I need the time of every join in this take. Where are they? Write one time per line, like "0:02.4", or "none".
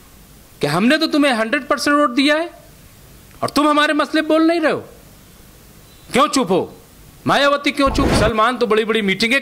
0:08.1